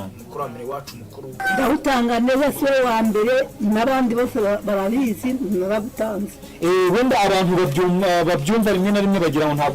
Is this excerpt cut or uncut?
cut